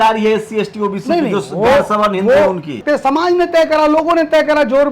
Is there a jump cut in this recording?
yes; 1 cut; at 2.8 s

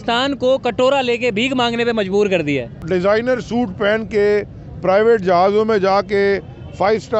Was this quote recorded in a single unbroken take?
no; 1 cut; at 2.7 s

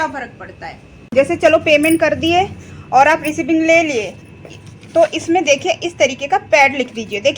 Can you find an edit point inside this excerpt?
yes; 1 cut; at 1.0 s

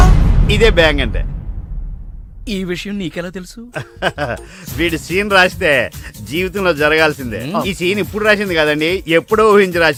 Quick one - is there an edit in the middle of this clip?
no; 0 cuts

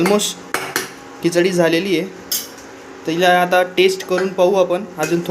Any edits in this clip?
no; 0 cuts

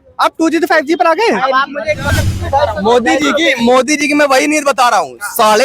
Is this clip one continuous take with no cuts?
no; 1 cut; at 2.2 s

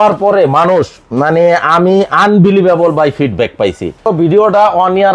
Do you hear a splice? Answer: yes; 1 cut; at 4.0 s

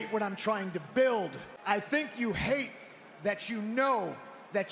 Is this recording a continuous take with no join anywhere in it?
no; 1 cut; at 1.5 s

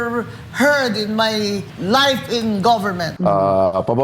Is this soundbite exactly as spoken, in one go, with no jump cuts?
no; 2 cuts; at 1.7 s, 3.0 s

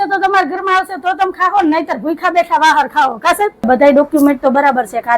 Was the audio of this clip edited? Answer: yes; 1 cut; at 3.7 s

